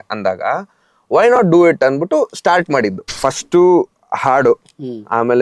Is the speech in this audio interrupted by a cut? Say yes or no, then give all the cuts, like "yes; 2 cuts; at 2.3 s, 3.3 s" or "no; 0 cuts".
yes; 1 cut; at 3.1 s